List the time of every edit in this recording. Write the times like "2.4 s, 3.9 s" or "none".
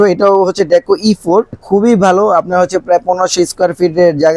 1.6 s